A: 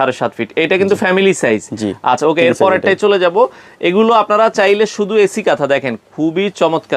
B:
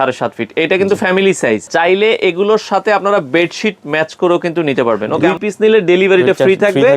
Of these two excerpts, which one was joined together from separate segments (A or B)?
B